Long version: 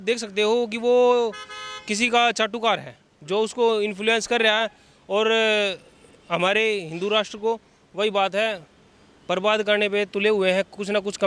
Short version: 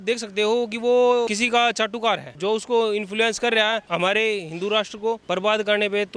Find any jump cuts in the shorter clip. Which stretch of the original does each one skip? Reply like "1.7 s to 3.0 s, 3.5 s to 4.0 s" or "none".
1.3 s to 1.9 s, 2.9 s to 3.2 s, 4.7 s to 6.2 s, 7.6 s to 9.2 s